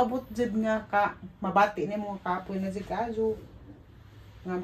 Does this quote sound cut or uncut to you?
uncut